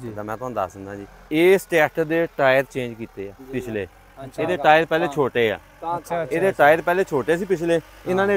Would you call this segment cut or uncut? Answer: cut